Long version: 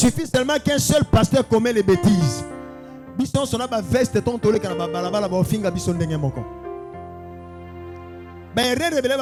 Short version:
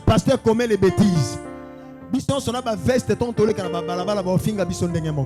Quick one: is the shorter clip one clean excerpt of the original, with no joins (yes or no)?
yes